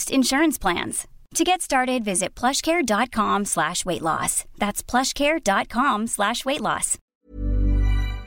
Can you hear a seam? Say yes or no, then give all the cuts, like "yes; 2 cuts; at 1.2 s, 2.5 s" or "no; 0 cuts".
yes; 1 cut; at 7.0 s